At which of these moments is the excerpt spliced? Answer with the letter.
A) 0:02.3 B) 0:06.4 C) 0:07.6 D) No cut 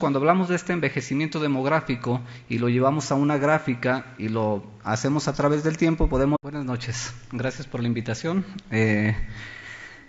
D